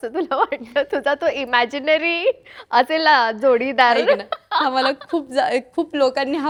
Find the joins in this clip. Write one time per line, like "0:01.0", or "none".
none